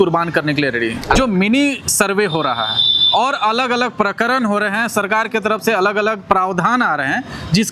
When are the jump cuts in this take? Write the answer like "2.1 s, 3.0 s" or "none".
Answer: 1.2 s

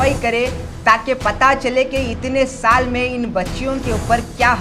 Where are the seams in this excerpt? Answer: none

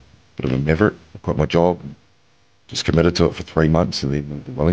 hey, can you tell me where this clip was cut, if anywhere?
1.1 s

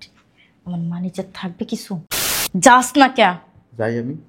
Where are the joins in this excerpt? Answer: 2.1 s

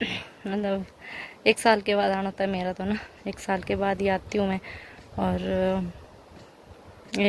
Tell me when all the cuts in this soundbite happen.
none

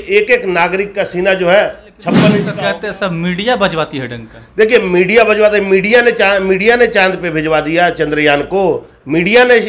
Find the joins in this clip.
2.4 s

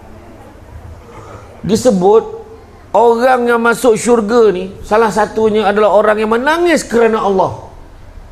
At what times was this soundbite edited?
none

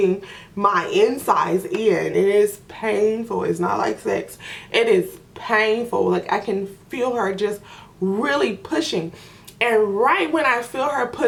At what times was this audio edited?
none

